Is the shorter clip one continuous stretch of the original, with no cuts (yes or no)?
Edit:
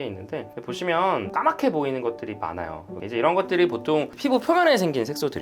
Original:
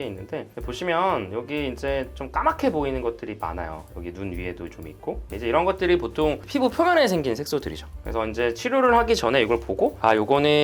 no